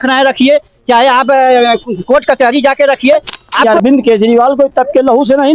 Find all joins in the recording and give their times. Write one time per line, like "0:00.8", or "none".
0:03.6